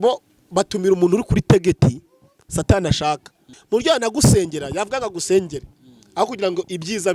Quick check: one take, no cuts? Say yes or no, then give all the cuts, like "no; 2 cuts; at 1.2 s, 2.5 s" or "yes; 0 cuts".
no; 1 cut; at 3.6 s